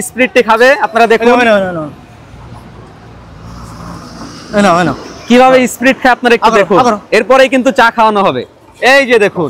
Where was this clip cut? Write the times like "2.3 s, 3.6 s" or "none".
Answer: none